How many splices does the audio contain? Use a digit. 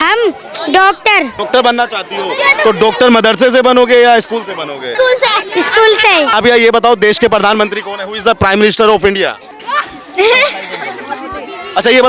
4